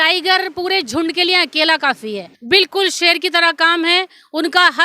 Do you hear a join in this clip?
yes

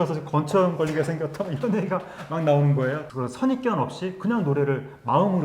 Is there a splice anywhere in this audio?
yes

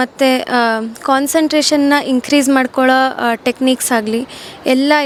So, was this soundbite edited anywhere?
no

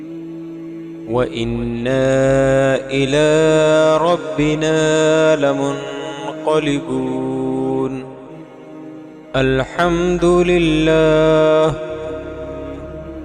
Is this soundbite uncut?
no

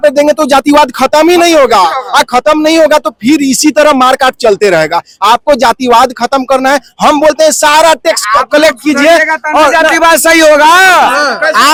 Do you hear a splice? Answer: no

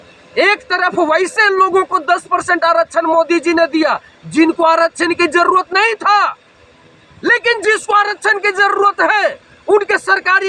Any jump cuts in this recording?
no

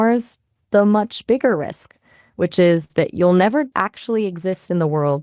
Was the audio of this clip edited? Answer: yes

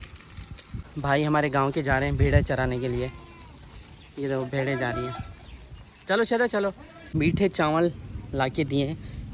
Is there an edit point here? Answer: yes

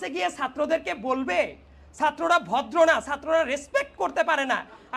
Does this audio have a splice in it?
no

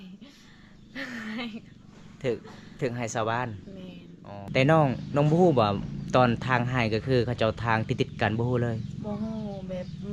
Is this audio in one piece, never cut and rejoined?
no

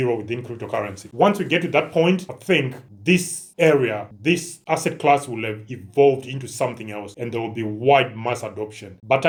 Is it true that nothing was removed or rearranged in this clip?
yes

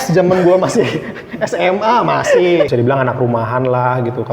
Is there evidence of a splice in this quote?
yes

